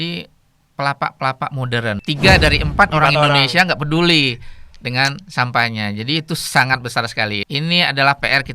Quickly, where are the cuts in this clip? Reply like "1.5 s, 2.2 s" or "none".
2.0 s, 7.4 s